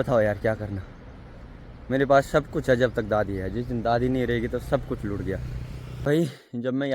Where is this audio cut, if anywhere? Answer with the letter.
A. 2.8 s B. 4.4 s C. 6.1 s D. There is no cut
C